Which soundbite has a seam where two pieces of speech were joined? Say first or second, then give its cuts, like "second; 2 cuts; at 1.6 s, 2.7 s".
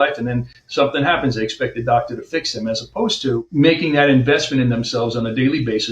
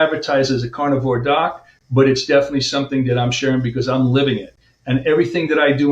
first; 1 cut; at 3.5 s